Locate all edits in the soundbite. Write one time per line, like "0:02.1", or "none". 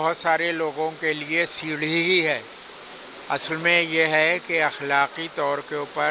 none